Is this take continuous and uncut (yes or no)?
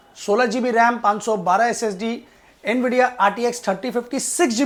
yes